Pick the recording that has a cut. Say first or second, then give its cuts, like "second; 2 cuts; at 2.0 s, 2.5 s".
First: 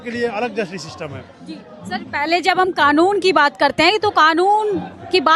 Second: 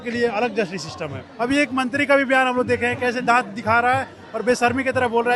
second; 1 cut; at 1.2 s